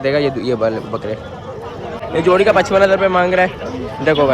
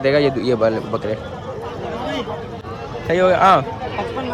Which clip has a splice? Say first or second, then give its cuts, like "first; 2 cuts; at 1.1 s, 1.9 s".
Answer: first; 1 cut; at 2.0 s